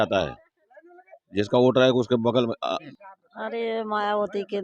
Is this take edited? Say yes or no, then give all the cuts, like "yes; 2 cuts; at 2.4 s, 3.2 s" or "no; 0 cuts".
yes; 1 cut; at 2.9 s